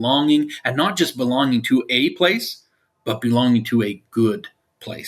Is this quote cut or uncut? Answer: uncut